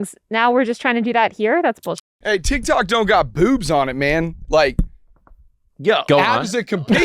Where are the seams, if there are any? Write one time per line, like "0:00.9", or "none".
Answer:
0:02.1